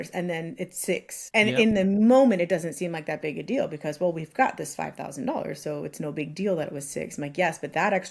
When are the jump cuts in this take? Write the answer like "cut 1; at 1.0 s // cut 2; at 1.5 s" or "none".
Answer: cut 1; at 1.2 s